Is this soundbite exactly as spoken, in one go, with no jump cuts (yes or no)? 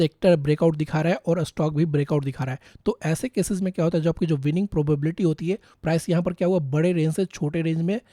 no